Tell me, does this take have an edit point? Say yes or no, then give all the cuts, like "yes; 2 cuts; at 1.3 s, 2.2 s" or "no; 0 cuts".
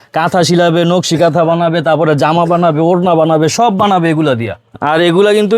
yes; 1 cut; at 4.7 s